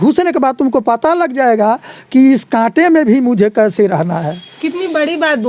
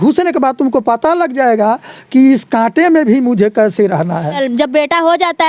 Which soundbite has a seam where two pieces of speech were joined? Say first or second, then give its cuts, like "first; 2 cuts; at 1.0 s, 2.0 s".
second; 1 cut; at 4.4 s